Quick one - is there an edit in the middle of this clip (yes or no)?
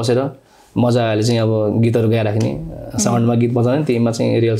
no